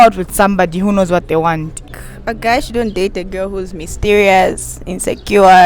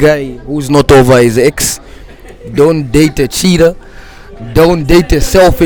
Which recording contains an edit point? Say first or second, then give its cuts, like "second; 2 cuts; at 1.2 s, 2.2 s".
first; 1 cut; at 1.8 s